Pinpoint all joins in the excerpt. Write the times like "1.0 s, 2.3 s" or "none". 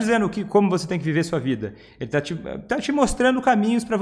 none